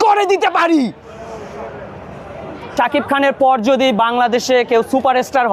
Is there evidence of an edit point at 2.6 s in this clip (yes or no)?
yes